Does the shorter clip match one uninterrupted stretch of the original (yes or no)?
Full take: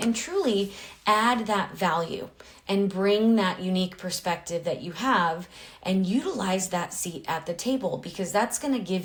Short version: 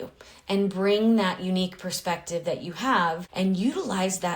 no